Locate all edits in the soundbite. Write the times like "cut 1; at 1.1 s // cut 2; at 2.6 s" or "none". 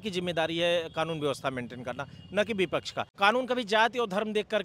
cut 1; at 3.0 s